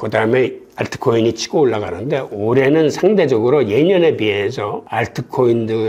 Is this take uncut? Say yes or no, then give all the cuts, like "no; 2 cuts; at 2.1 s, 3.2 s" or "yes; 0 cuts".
yes; 0 cuts